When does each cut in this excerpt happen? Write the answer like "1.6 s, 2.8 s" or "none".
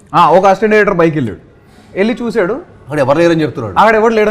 none